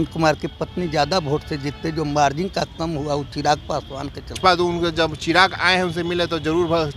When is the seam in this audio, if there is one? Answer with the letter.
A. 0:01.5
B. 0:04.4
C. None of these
B